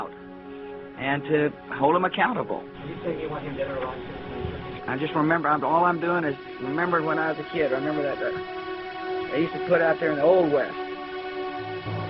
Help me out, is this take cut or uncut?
cut